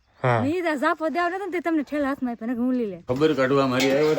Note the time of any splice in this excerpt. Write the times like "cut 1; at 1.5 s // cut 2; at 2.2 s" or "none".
cut 1; at 3.0 s